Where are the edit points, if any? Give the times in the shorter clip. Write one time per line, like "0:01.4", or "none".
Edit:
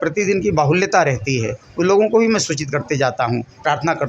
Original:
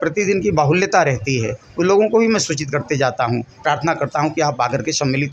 none